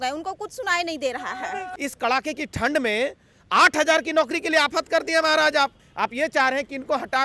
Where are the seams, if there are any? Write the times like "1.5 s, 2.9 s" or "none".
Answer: 1.7 s, 5.8 s

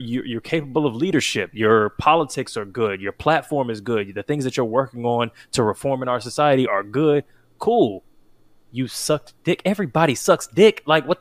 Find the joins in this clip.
none

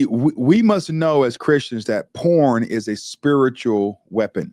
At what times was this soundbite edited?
none

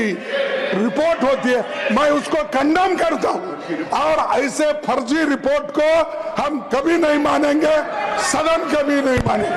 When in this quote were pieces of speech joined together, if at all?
none

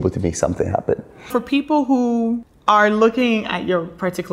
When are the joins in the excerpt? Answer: 1.3 s, 2.5 s

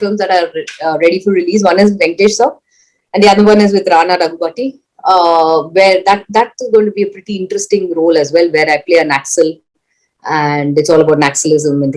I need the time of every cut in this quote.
none

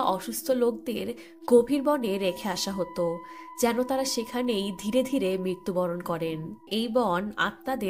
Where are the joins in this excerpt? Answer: 6.6 s

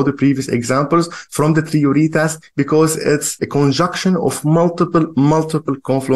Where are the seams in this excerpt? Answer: 3.4 s

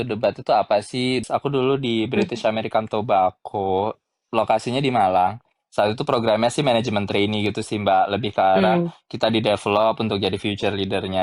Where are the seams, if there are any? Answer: 1.2 s

